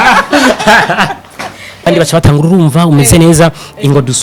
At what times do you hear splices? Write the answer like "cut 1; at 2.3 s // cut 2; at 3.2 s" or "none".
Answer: cut 1; at 1.9 s